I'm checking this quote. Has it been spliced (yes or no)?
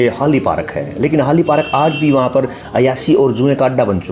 no